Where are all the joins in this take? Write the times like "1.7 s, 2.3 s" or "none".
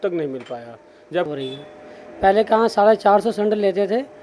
1.3 s